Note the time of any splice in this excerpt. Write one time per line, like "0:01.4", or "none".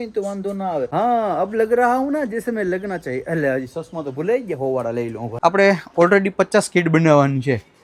0:00.9
0:05.2